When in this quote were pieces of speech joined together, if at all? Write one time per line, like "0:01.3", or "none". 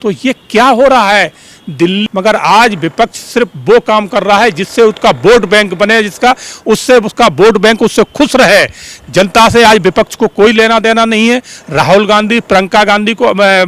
0:02.0